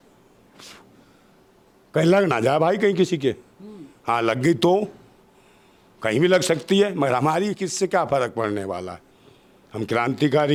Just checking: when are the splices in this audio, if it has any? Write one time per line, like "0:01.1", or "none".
none